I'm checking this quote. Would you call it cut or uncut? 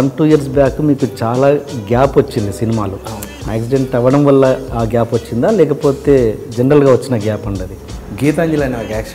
cut